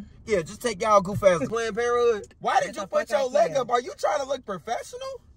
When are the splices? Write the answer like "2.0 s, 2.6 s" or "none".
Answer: 1.5 s, 2.3 s